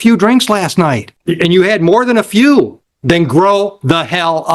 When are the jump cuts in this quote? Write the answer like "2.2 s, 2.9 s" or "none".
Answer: 1.1 s, 2.9 s